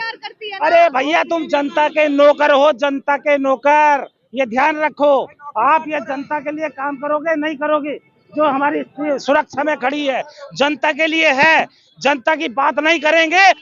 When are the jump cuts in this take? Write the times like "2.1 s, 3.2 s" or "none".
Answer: none